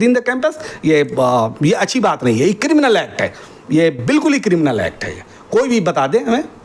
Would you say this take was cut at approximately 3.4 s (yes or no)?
no